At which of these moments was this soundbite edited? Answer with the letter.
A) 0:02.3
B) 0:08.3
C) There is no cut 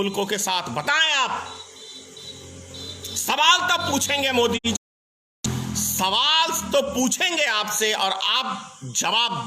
C